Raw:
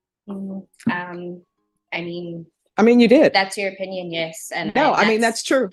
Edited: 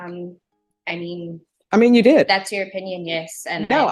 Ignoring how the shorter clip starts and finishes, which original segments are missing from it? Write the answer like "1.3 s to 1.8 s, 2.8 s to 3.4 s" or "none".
none